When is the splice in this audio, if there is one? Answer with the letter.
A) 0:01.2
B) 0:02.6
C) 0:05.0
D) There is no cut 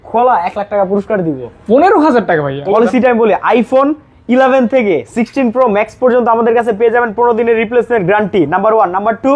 B